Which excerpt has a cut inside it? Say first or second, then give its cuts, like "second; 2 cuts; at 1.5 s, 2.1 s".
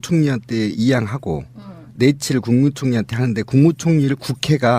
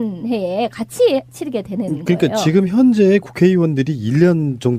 first; 1 cut; at 3.7 s